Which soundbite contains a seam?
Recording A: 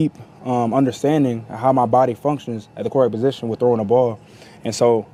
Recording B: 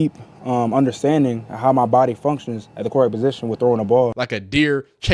B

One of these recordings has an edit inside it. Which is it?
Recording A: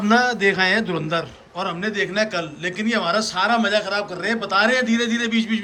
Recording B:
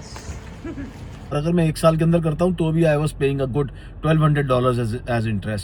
B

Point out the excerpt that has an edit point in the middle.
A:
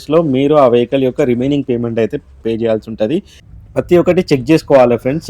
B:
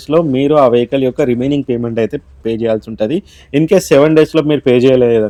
A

